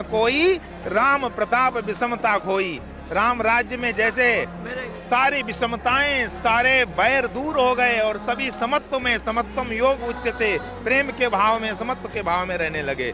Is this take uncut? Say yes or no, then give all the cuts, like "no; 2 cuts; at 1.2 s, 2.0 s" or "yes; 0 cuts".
yes; 0 cuts